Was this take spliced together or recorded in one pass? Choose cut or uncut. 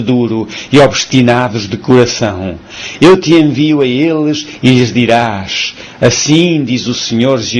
cut